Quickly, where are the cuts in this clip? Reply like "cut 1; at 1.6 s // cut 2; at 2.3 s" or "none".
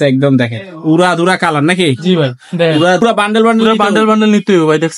cut 1; at 3.0 s